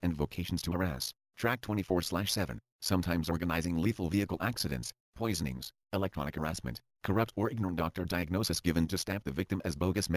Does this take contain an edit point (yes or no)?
yes